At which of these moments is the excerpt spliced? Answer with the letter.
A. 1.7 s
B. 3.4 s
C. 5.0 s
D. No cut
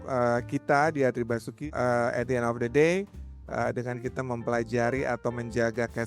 A